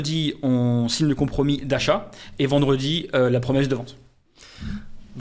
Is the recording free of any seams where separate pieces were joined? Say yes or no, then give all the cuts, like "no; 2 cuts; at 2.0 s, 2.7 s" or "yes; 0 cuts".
yes; 0 cuts